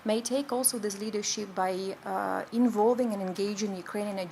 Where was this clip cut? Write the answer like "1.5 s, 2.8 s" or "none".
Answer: none